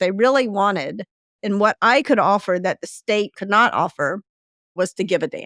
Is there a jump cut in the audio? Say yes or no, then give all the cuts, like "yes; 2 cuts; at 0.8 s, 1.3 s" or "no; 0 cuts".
yes; 2 cuts; at 3.4 s, 4.8 s